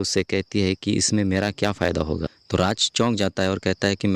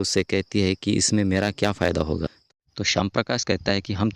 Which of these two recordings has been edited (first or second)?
second